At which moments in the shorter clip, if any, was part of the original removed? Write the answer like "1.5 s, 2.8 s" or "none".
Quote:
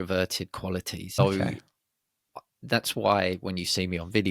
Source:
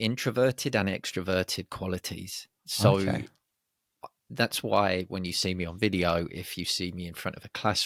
1.2 s